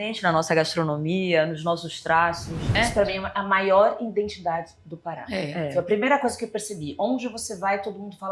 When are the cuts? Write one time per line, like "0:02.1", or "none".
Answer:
0:02.6